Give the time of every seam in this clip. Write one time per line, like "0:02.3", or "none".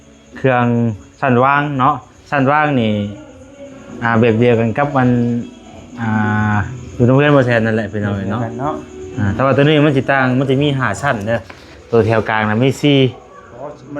none